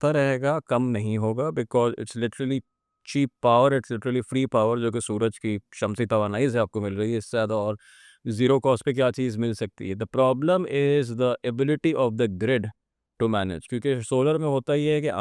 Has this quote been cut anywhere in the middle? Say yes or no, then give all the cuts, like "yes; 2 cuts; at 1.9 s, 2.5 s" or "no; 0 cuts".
no; 0 cuts